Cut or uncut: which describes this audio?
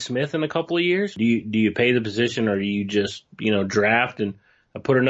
cut